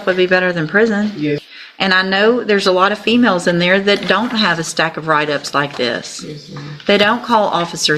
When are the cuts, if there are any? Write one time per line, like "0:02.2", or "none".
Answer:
0:01.5